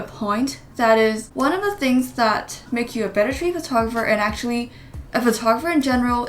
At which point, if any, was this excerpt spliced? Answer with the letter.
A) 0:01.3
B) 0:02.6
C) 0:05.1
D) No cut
A